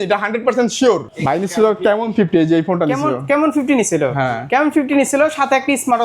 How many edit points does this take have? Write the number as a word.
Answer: one